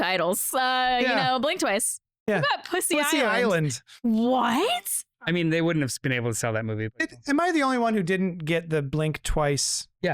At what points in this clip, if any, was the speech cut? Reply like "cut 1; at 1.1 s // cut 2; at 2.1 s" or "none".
cut 1; at 4.8 s